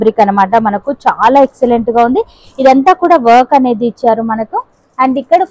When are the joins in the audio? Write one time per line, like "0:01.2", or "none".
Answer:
none